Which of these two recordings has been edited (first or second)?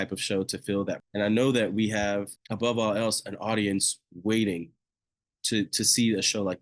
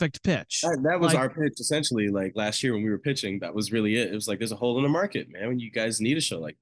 first